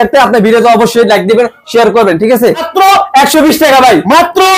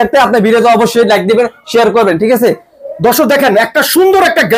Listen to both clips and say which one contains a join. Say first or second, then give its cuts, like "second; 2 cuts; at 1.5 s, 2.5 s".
first; 1 cut; at 2.7 s